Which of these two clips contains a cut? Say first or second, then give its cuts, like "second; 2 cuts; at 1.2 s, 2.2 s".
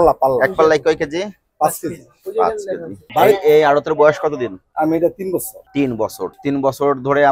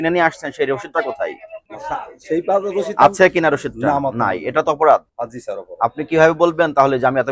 first; 1 cut; at 2.9 s